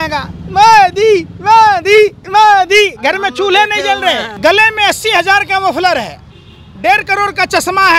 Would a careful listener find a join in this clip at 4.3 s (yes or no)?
yes